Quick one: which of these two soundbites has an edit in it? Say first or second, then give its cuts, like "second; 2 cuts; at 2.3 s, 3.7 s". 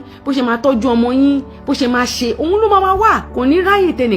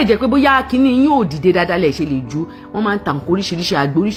first; 1 cut; at 3.3 s